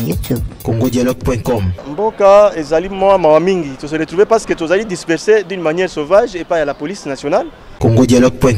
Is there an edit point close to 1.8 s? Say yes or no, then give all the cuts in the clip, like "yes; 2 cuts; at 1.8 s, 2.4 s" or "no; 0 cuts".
yes; 2 cuts; at 1.8 s, 7.7 s